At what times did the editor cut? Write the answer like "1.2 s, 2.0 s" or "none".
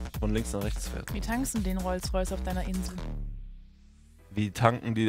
none

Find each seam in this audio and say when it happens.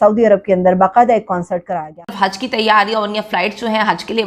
1.6 s

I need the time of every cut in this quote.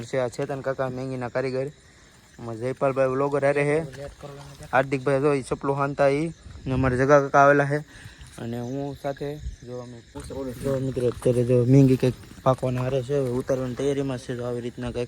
10.1 s

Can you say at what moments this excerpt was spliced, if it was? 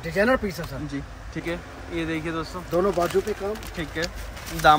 1.4 s

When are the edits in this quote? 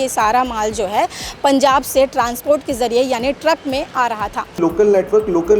4.6 s

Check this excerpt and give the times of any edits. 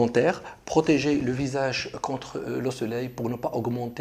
none

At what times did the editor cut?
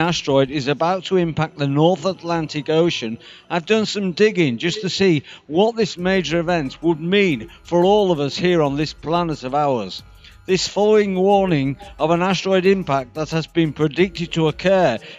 4.6 s

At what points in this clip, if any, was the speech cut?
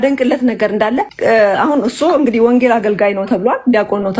1.1 s

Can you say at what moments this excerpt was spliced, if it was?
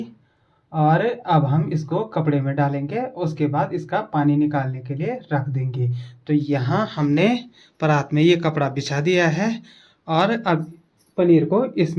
none

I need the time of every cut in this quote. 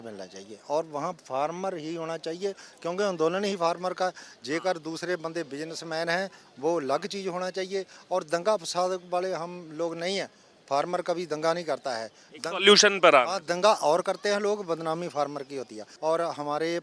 15.8 s

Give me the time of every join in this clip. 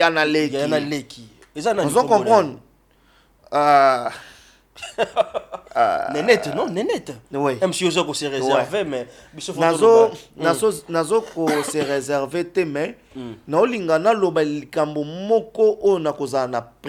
none

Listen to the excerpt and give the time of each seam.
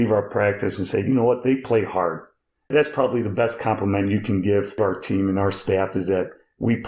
2.7 s, 4.8 s

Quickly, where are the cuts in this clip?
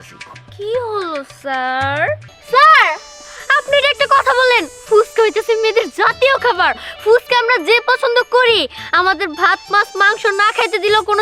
2.3 s

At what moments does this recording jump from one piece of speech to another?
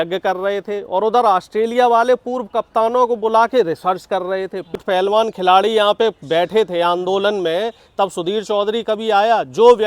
4.8 s

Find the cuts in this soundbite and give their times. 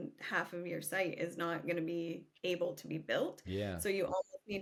none

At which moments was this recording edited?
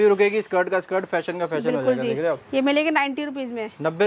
none

